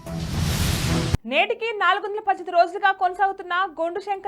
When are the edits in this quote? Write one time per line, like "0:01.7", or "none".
0:01.2